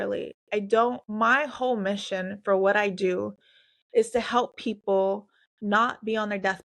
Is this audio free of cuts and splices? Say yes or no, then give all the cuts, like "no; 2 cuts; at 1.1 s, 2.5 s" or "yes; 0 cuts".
no; 1 cut; at 1.0 s